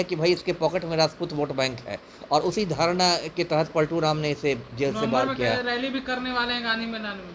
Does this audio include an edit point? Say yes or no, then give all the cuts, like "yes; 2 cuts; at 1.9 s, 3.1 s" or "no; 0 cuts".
no; 0 cuts